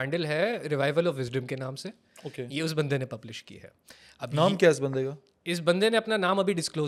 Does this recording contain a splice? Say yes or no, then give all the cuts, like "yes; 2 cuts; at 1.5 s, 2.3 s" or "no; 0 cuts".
no; 0 cuts